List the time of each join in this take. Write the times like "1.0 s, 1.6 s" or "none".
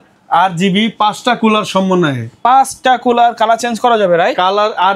none